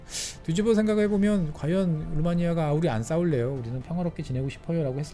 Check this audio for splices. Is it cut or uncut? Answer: uncut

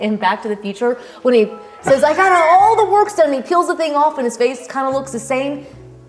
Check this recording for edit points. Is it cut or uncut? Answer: uncut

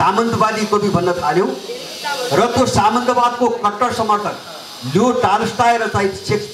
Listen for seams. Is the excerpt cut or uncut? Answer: uncut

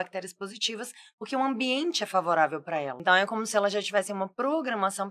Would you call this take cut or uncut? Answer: cut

